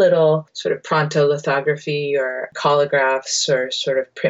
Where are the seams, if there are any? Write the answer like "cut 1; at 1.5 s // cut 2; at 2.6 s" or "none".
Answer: cut 1; at 2.4 s

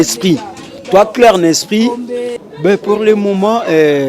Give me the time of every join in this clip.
cut 1; at 2.3 s

